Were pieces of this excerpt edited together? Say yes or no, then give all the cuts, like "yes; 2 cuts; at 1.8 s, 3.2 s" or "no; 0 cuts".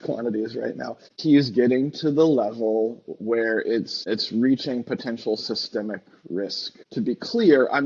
yes; 2 cuts; at 1.2 s, 6.8 s